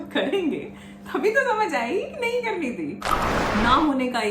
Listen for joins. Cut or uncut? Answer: cut